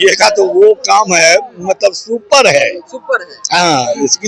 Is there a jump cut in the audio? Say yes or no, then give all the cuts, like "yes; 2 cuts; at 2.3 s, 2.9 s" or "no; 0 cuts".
no; 0 cuts